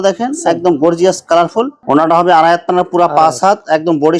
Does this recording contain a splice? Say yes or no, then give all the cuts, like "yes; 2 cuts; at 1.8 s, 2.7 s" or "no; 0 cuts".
yes; 1 cut; at 1.8 s